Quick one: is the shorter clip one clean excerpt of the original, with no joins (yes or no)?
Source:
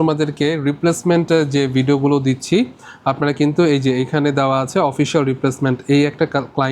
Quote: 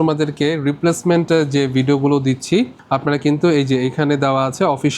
no